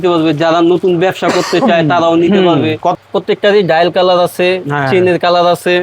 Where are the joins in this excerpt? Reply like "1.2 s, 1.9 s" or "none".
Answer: 2.9 s